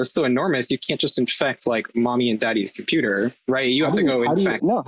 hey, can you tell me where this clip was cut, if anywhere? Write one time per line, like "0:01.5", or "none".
none